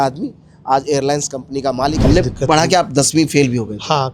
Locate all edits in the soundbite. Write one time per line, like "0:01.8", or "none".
0:02.0

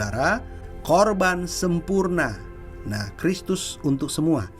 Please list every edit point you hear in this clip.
none

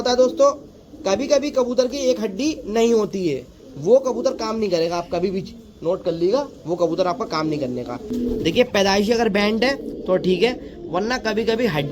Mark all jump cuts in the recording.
0:08.0

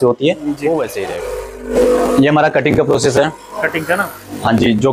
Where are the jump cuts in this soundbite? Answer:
0:01.2

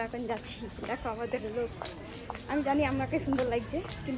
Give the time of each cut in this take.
none

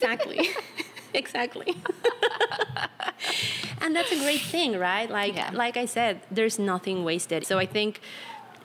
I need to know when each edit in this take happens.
0:07.4

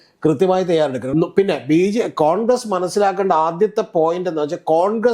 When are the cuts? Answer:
0:01.0

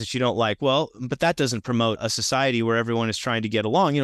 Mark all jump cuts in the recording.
0:02.0

